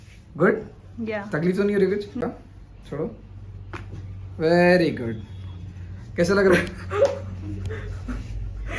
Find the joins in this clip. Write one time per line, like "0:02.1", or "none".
0:02.2

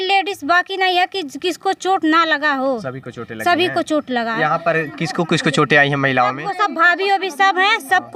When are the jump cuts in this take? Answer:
none

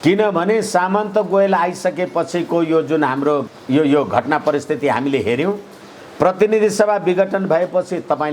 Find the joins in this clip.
0:03.5

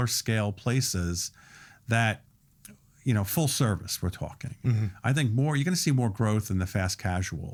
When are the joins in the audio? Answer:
none

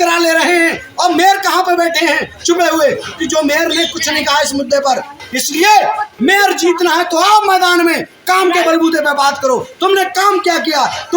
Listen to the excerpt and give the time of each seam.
0:05.2

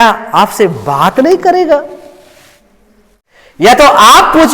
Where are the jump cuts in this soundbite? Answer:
0:03.2

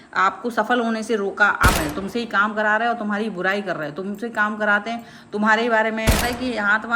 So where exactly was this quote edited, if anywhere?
0:01.8
0:06.2

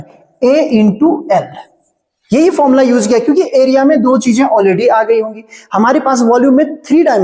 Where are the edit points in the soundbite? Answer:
none

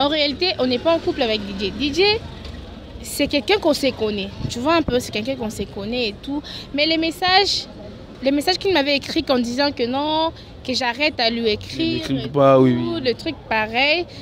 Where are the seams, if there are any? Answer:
none

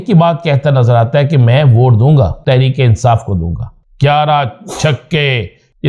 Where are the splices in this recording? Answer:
0:02.4
0:03.8

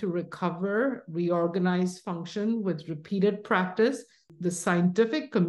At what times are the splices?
0:04.2

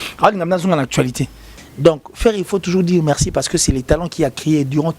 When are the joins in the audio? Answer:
0:01.5

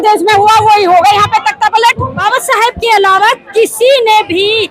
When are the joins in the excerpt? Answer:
0:02.1

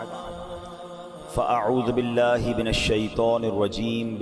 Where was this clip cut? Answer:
none

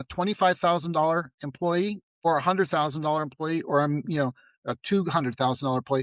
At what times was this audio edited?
0:02.1

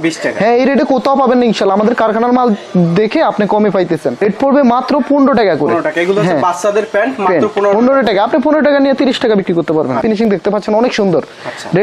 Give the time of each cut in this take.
0:04.2
0:10.0

